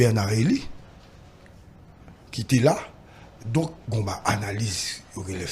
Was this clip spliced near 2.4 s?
no; 1 cut; at 4.3 s

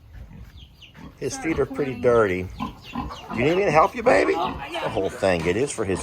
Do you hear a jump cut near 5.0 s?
yes; 1 cut; at 5.0 s

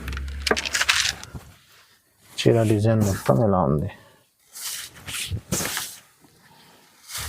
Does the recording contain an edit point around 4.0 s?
no; 1 cut; at 1.2 s

